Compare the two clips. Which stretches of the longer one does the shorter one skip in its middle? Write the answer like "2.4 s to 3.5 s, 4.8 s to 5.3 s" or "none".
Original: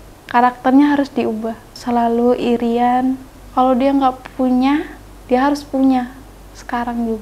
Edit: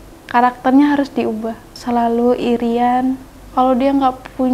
none